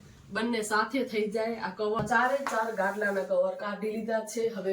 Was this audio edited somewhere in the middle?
yes; 1 cut; at 2.0 s

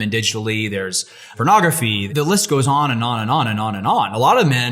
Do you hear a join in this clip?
yes; 2 cuts; at 1.3 s, 2.1 s

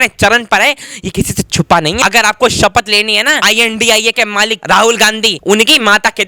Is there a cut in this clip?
yes; 4 cuts; at 2.0 s, 3.4 s, 4.6 s, 5.3 s

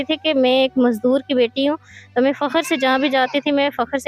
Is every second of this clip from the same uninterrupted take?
yes; 0 cuts

